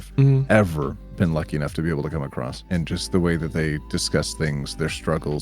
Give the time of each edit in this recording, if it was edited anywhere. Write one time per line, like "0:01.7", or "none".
0:02.6